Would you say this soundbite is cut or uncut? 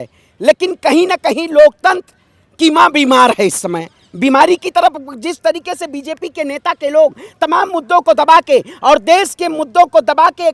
uncut